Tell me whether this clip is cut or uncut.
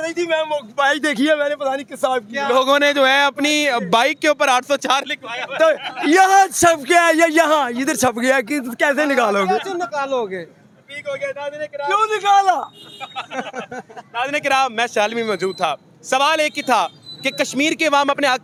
uncut